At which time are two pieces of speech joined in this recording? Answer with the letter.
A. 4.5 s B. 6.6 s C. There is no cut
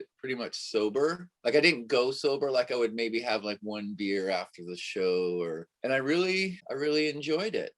B